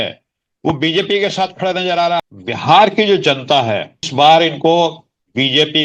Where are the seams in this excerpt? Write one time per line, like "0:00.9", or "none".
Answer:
0:02.2
0:04.0